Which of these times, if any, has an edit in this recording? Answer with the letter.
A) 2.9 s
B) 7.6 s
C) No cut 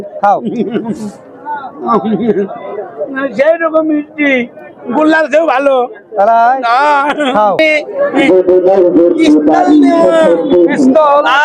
B